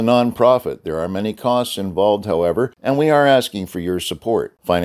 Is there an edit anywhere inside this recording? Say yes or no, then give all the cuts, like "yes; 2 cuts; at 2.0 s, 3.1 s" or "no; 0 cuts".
yes; 1 cut; at 2.8 s